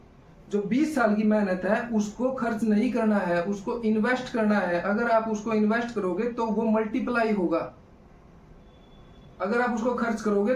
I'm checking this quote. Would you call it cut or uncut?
uncut